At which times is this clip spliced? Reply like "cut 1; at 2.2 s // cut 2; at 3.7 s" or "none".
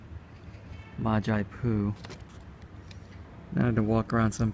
cut 1; at 1.5 s